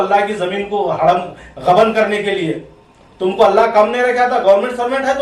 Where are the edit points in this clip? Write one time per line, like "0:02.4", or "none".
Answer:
none